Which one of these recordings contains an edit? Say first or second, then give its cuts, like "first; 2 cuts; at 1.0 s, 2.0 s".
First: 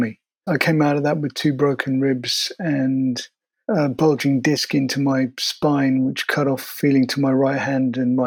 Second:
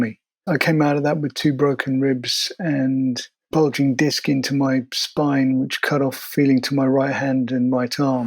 second; 1 cut; at 3.5 s